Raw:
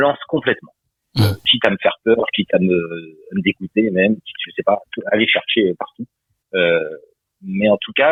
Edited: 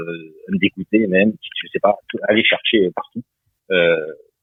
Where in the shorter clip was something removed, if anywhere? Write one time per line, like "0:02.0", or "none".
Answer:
none